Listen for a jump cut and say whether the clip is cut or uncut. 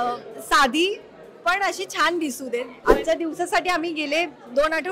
cut